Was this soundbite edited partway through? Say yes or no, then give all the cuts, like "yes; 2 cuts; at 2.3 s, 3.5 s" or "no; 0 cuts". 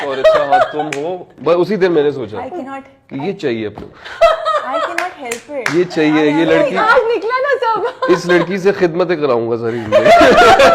yes; 1 cut; at 1.3 s